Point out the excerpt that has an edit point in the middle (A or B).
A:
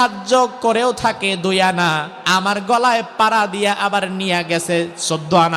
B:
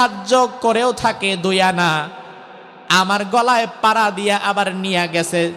A